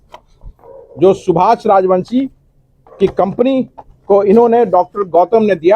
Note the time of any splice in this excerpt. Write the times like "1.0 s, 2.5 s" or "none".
none